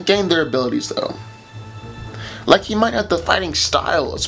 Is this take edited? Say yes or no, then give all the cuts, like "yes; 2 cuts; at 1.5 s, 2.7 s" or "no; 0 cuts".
no; 0 cuts